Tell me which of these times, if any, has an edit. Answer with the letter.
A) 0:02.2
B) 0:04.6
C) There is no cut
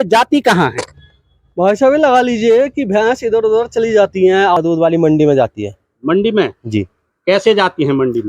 B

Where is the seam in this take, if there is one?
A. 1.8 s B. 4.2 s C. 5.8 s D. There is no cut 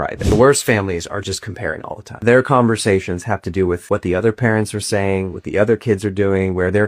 A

